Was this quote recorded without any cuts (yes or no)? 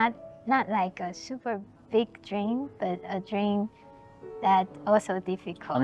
yes